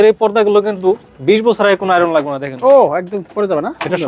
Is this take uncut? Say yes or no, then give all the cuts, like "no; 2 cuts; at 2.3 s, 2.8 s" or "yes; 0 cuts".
yes; 0 cuts